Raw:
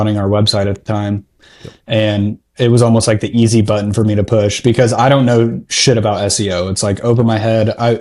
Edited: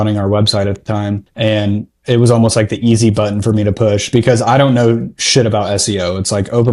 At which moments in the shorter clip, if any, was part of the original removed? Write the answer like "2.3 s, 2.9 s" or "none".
1.3 s